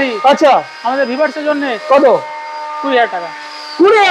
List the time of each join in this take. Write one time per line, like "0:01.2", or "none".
none